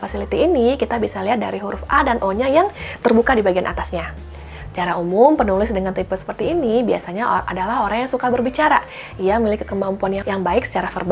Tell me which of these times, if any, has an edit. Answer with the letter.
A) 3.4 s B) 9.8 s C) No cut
C